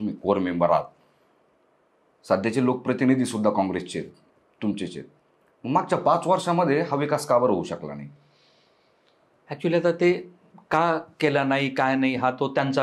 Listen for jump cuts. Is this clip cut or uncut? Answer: uncut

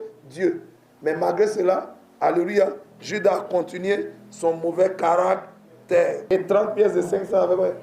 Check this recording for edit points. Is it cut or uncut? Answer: cut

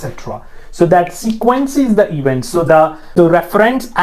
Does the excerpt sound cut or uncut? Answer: cut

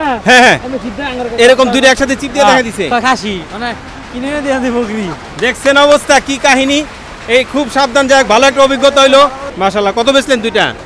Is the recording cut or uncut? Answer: cut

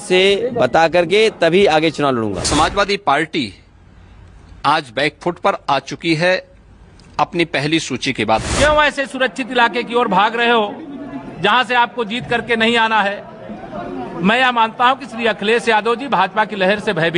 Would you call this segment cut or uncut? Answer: cut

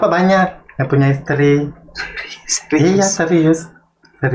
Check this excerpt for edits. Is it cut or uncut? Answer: uncut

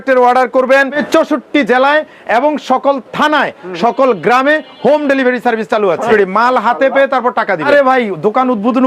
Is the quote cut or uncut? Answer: cut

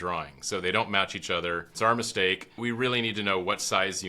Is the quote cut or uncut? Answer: cut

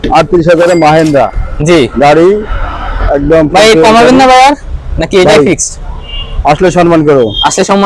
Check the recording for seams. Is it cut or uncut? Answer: uncut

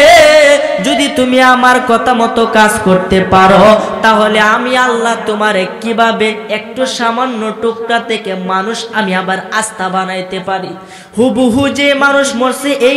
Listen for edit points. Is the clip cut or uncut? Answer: uncut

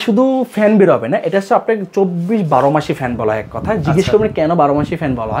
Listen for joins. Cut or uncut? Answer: uncut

